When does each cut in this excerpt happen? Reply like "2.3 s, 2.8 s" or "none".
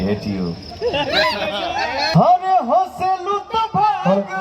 2.1 s